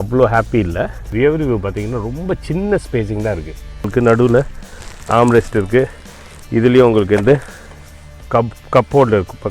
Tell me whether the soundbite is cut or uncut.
cut